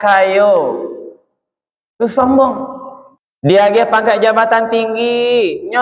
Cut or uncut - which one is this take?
cut